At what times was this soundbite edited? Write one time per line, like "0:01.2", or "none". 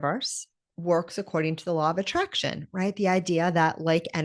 none